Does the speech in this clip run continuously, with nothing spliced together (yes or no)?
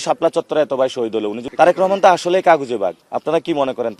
no